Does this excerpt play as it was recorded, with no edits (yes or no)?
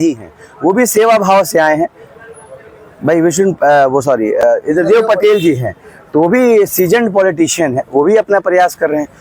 yes